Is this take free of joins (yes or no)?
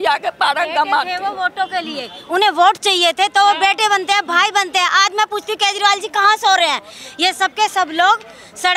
yes